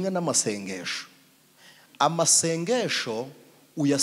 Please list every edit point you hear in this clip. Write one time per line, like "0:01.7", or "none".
none